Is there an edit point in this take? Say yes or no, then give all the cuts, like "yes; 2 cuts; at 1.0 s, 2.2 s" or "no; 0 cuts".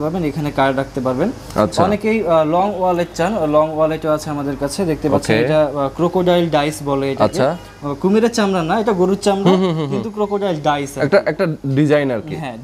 no; 0 cuts